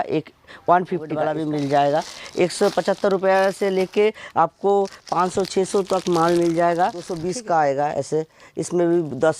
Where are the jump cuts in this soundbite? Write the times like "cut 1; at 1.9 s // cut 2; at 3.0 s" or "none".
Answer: cut 1; at 1.2 s // cut 2; at 7.2 s